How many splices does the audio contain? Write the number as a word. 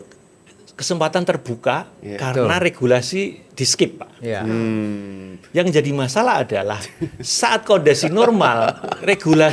zero